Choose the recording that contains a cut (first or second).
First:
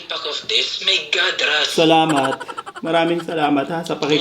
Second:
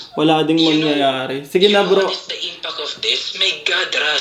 first